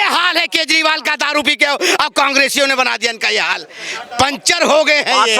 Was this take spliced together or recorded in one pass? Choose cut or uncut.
uncut